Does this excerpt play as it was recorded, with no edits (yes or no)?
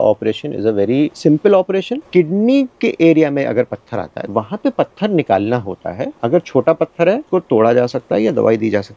no